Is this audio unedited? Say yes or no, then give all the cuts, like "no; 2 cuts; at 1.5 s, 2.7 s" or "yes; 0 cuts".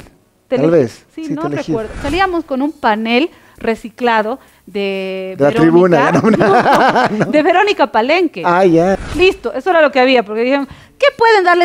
no; 2 cuts; at 2.0 s, 9.0 s